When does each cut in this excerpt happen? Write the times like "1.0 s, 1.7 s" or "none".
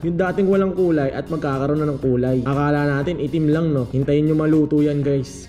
none